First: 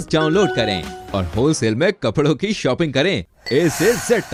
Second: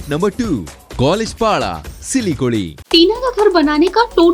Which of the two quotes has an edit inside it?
second; 1 cut; at 2.8 s

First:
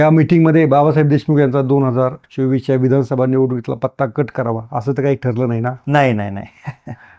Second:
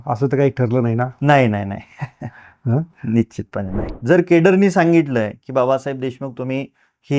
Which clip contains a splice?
second; 1 cut; at 3.8 s

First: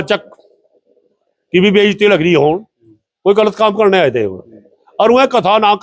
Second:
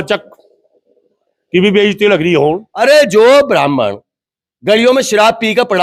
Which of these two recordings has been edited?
second; 1 cut; at 2.7 s

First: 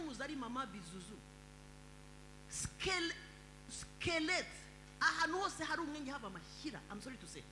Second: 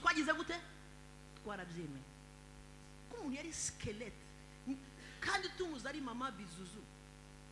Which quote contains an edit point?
second; 1 cut; at 3.0 s

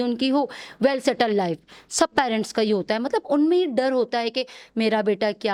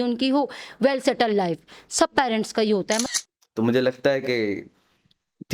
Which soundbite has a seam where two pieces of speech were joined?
second; 1 cut; at 3.0 s

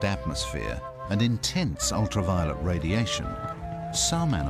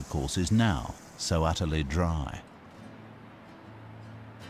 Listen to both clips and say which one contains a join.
first; 1 cut; at 3.2 s

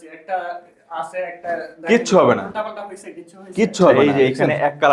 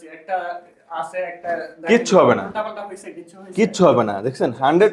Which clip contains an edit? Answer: first; 1 cut; at 3.9 s

